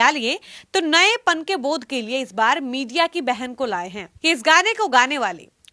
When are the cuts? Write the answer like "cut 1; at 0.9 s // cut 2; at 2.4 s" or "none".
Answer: cut 1; at 4.1 s